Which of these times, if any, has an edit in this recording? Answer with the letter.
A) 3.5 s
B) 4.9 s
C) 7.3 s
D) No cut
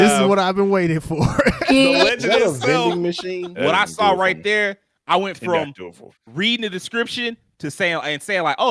A